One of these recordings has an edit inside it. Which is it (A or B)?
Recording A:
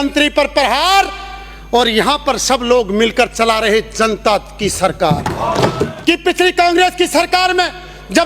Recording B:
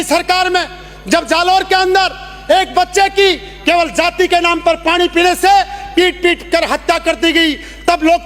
A